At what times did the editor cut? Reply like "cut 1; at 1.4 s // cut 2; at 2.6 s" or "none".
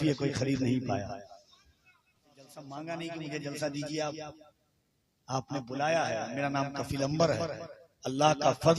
cut 1; at 2.7 s